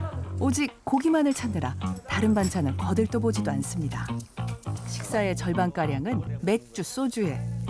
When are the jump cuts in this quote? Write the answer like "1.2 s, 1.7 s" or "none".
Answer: 5.0 s, 6.3 s